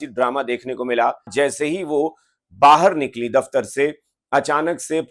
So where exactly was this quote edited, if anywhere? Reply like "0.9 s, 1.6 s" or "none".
1.3 s